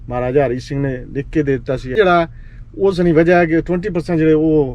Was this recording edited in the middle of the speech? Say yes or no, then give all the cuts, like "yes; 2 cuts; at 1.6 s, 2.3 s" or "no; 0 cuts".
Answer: yes; 1 cut; at 1.9 s